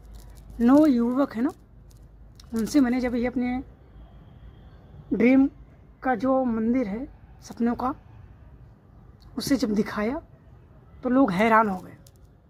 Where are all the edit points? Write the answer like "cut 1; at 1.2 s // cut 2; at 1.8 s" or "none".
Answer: none